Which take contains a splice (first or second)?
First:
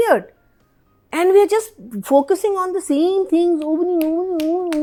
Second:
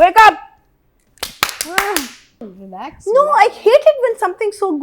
second